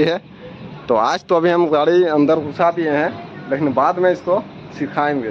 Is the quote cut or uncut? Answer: uncut